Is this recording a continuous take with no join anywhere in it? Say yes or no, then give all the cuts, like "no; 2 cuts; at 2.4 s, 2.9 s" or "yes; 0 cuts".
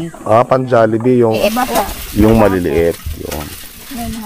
no; 1 cut; at 1.4 s